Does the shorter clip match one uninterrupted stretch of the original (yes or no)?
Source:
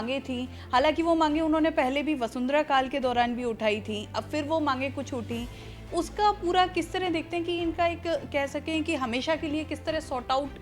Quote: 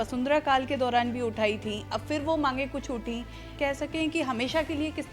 no